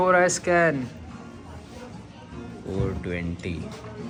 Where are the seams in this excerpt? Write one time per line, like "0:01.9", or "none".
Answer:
none